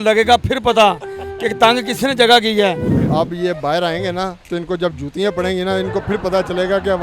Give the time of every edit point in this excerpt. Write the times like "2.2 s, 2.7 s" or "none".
2.9 s